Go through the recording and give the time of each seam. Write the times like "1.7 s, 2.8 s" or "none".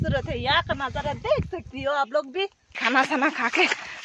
2.8 s